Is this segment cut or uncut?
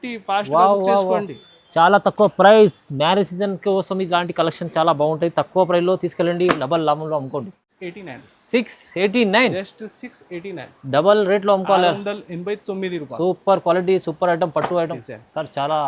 cut